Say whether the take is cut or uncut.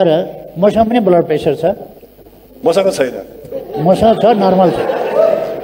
uncut